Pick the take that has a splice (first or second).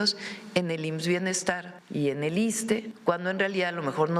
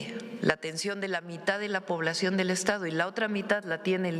first